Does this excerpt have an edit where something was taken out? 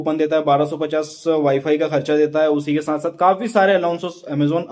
no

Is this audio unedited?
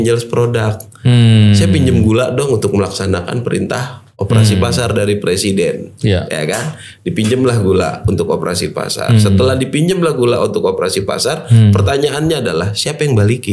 yes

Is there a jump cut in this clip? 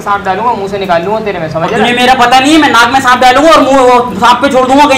no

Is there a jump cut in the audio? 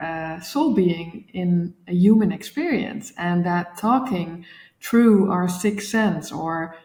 no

